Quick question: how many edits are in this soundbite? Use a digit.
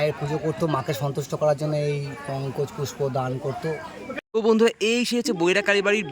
1